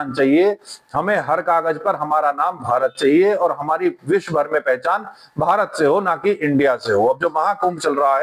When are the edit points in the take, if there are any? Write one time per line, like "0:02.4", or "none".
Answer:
none